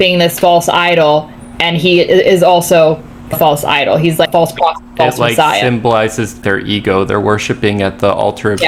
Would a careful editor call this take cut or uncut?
uncut